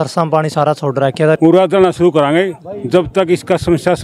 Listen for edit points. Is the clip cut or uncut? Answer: cut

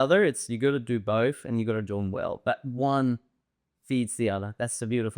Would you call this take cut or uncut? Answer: uncut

